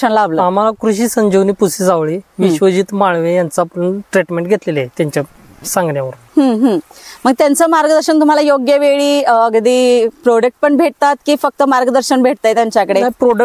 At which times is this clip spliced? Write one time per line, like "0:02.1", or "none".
none

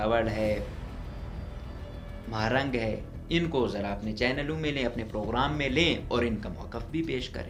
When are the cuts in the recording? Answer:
none

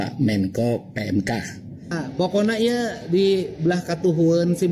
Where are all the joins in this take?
0:01.9

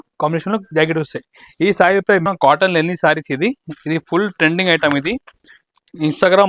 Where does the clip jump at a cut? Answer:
0:02.3

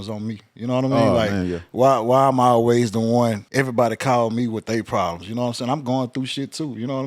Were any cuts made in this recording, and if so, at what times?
0:03.4

